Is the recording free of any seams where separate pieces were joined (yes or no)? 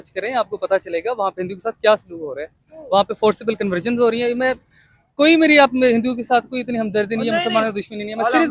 yes